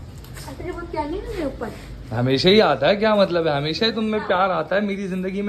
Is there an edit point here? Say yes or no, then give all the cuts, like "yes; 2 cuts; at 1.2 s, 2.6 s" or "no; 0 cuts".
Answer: no; 0 cuts